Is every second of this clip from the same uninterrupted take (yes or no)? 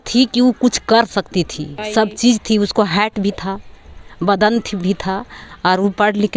no